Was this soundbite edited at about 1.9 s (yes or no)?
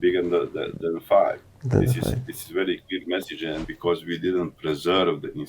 no